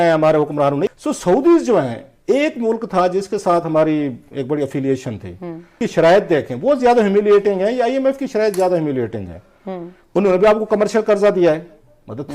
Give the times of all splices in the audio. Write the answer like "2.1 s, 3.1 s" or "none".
0.9 s, 5.8 s